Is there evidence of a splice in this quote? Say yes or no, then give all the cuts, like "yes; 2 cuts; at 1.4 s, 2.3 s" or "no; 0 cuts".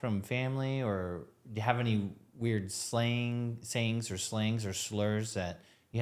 no; 0 cuts